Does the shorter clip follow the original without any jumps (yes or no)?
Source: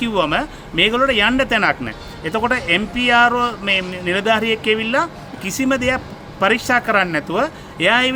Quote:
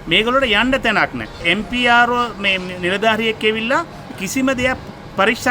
no